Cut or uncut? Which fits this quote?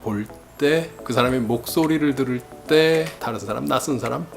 cut